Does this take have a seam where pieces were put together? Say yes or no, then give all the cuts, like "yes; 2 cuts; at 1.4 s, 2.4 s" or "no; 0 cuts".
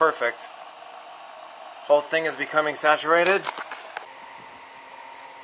yes; 1 cut; at 4.1 s